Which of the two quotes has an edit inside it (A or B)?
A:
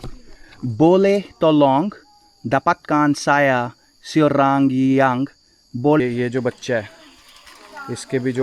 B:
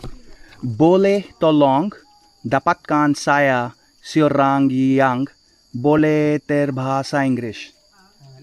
A